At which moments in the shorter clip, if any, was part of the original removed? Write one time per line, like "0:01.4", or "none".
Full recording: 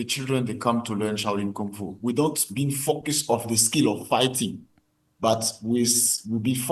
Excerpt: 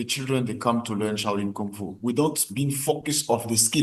none